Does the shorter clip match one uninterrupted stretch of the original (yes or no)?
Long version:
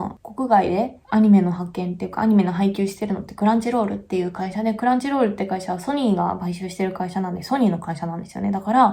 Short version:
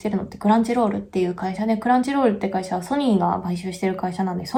yes